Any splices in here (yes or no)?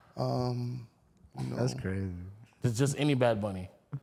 no